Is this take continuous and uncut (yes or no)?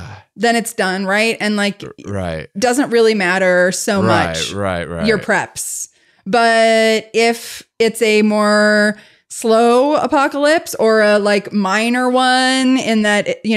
yes